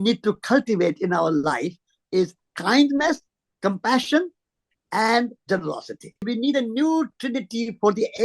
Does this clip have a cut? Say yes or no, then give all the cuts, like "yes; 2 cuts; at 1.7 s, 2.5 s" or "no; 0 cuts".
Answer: yes; 1 cut; at 6.3 s